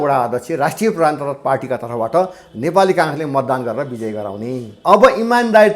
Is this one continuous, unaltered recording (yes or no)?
no